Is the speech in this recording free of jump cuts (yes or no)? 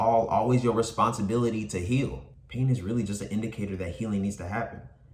no